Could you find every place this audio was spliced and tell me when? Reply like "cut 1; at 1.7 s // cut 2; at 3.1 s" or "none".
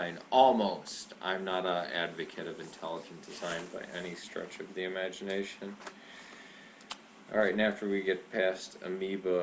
cut 1; at 4.5 s